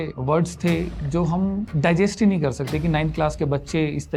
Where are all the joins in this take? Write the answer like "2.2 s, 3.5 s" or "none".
none